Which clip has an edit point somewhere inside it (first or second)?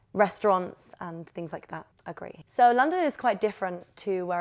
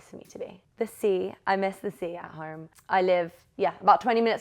second